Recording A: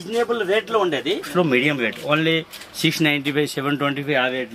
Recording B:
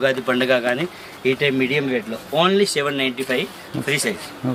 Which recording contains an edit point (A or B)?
A